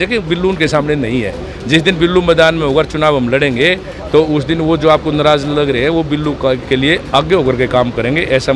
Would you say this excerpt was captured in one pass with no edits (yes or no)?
yes